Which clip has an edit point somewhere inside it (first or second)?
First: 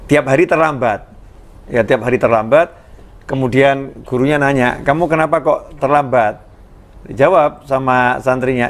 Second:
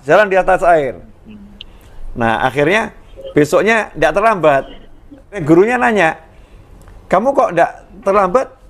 second